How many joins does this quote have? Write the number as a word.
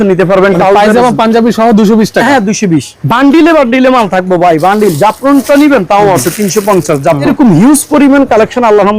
two